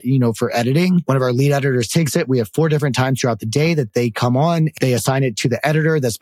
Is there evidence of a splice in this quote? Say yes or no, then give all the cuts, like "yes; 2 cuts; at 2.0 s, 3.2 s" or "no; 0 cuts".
yes; 3 cuts; at 1.0 s, 3.9 s, 4.7 s